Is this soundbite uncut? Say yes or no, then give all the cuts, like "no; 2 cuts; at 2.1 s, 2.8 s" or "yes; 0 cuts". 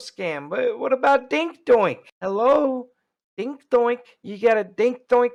yes; 0 cuts